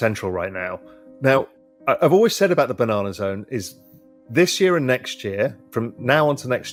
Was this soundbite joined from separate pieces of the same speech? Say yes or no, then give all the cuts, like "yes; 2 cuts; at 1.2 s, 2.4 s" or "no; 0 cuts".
no; 0 cuts